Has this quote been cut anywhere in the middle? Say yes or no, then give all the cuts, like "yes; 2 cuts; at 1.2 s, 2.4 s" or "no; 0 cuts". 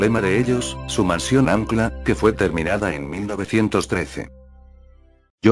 no; 0 cuts